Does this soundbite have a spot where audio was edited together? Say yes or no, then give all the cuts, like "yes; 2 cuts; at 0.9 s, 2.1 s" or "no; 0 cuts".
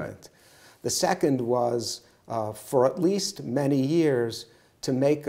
no; 0 cuts